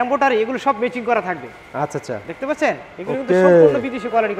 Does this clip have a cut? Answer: no; 0 cuts

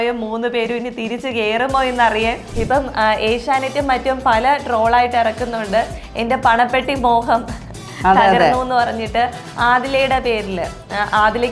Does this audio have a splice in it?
yes; 1 cut; at 2.5 s

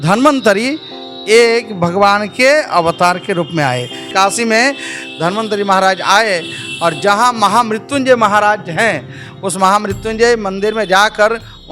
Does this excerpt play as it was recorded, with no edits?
no; 1 cut; at 4.1 s

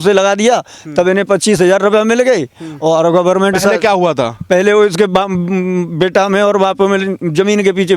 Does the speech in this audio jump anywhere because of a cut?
no; 0 cuts

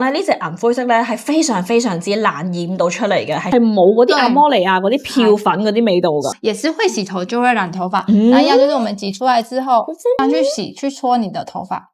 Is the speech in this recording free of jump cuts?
no; 2 cuts; at 3.5 s, 6.3 s

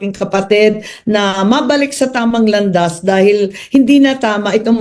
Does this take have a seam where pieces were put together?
yes; 1 cut; at 2.9 s

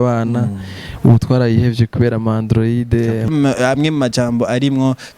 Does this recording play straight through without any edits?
no; 1 cut; at 3.3 s

